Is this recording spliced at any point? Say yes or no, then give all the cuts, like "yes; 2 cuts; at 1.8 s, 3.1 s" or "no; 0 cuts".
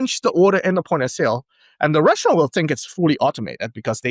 no; 0 cuts